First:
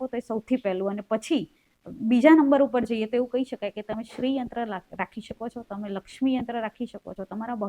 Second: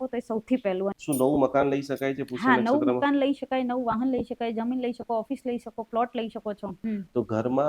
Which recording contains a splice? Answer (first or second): second